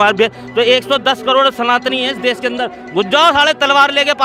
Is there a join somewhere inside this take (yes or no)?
no